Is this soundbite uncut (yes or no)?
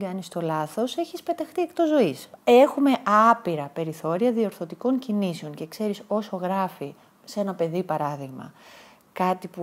no